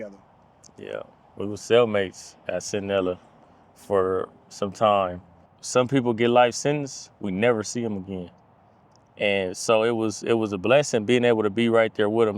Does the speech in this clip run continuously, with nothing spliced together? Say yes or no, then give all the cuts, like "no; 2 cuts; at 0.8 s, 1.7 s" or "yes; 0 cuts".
no; 1 cut; at 5.5 s